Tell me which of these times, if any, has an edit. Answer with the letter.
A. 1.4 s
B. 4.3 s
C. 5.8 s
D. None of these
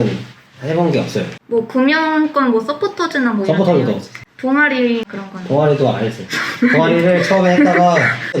A